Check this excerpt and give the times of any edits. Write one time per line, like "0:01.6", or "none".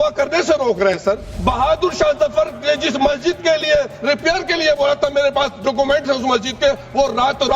0:01.3